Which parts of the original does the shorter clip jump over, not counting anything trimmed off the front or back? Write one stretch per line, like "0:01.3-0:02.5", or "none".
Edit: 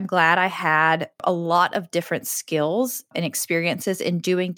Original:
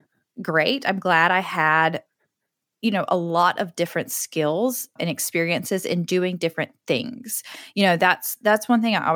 0:02.1-0:03.0